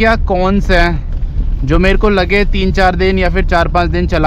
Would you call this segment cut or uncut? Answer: uncut